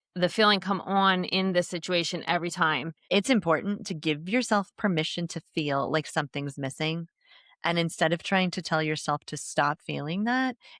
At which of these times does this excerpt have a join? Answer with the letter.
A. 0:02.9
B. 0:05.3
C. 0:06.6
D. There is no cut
A